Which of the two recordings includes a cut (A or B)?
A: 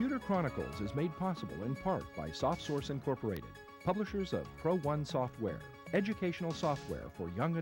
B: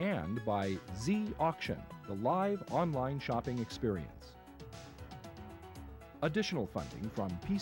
B